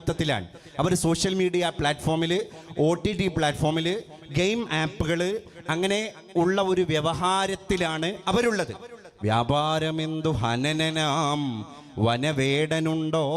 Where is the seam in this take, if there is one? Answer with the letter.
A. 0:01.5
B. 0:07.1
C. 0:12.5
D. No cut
D